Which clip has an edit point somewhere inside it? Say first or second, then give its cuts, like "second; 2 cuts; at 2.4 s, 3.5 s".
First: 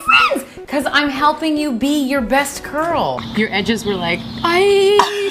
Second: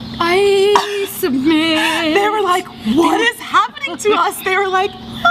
first; 1 cut; at 3.3 s